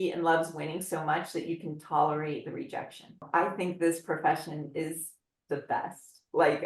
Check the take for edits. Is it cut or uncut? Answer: cut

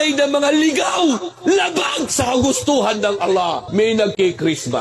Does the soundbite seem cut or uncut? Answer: cut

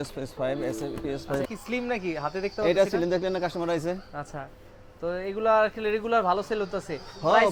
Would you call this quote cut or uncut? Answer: uncut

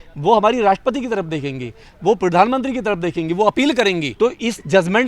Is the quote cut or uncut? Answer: cut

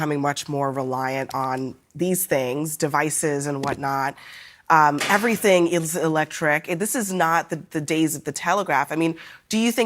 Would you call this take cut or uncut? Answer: uncut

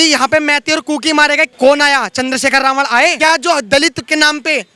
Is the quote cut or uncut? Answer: cut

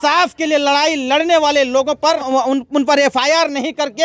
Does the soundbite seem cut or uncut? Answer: cut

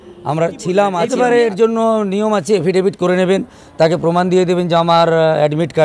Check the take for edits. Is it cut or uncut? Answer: cut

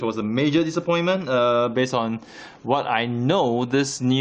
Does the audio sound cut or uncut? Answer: cut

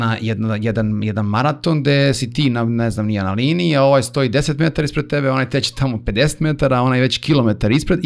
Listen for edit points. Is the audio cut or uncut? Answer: uncut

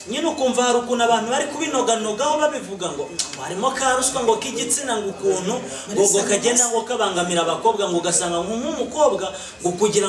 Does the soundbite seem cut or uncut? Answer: uncut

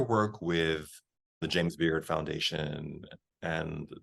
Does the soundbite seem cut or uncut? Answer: cut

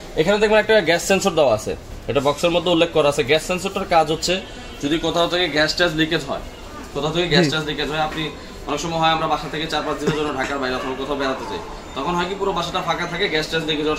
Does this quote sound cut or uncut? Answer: uncut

